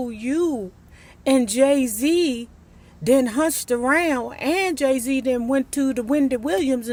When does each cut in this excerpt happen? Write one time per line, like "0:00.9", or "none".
none